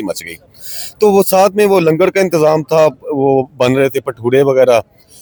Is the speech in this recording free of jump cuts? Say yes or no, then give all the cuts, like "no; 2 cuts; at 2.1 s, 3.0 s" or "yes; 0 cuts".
yes; 0 cuts